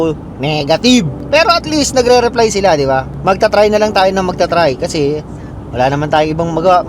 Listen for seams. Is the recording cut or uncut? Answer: cut